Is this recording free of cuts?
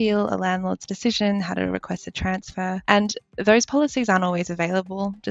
yes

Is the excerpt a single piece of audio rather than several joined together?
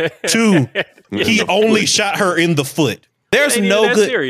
no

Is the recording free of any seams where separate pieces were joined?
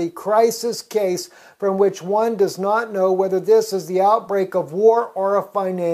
no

